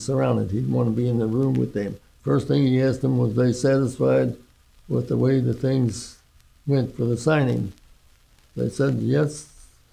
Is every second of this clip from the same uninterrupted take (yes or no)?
no